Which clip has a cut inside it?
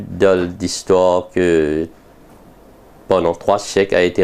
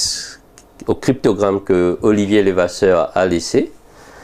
second; 1 cut; at 2.0 s

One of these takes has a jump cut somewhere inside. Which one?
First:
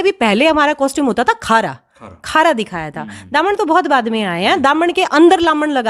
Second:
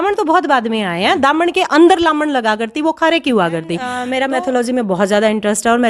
second; 1 cut; at 4.0 s

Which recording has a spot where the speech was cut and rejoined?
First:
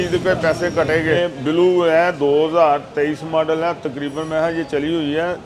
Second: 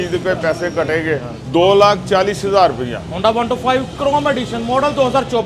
first; 1 cut; at 1.2 s

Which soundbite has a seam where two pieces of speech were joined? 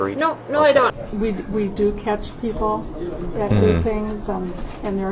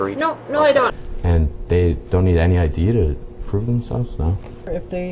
first; 1 cut; at 1.0 s

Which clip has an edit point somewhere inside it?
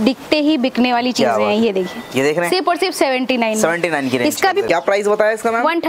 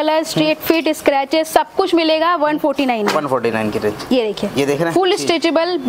first; 1 cut; at 4.7 s

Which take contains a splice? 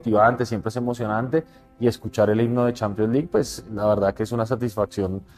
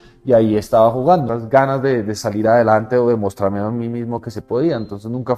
second; 1 cut; at 1.4 s

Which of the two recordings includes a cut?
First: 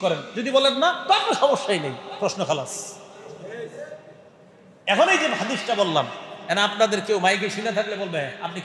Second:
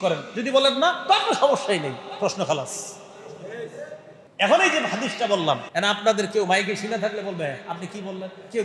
second; 2 cuts; at 4.2 s, 5.7 s

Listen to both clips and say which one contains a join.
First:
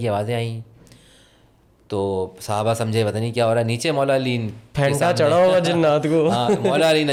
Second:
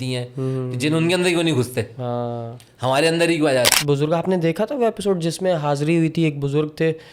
second; 1 cut; at 3.7 s

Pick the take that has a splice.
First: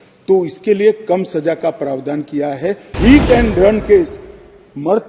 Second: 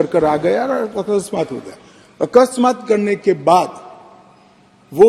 first; 1 cut; at 2.9 s

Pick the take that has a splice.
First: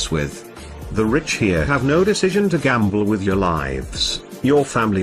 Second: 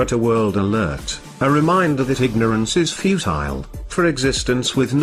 first; 1 cut; at 2.4 s

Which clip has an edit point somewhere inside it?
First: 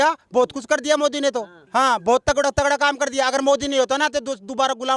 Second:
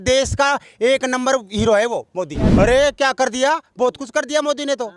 second; 1 cut; at 2.4 s

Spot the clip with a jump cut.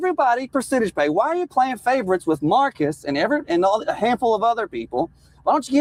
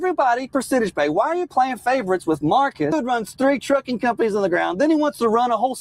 second; 1 cut; at 2.9 s

